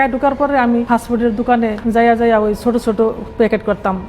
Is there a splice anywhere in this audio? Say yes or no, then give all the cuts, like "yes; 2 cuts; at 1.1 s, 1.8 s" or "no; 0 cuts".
yes; 2 cuts; at 0.9 s, 1.8 s